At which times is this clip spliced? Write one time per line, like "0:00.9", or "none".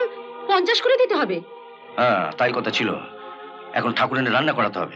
none